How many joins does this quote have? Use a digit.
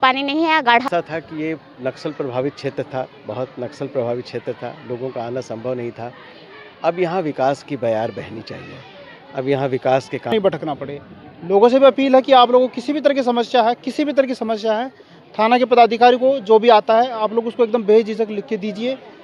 2